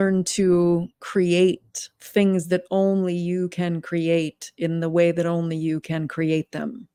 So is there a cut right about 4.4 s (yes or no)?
no